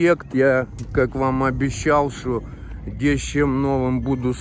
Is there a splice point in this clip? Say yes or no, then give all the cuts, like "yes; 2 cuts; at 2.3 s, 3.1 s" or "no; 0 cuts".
no; 0 cuts